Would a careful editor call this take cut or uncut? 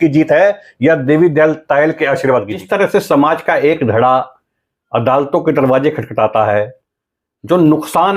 cut